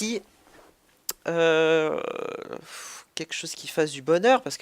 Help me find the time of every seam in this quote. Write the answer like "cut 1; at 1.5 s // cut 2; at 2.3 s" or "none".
cut 1; at 3.2 s